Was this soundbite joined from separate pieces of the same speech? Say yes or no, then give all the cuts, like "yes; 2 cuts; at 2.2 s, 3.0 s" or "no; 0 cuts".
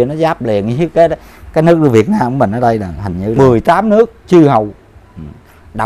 yes; 1 cut; at 3.3 s